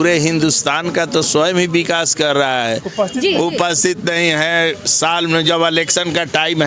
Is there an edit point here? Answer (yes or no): yes